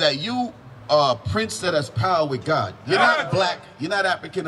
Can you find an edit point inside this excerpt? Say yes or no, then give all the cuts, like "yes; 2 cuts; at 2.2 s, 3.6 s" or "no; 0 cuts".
no; 0 cuts